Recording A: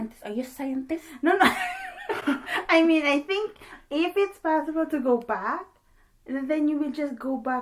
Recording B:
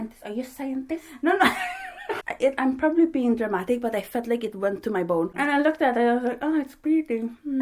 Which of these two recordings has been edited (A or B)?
B